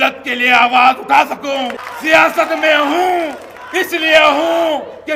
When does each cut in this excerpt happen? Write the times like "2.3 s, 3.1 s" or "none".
1.9 s